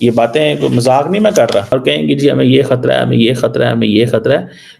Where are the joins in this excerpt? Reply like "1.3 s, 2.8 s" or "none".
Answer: 1.7 s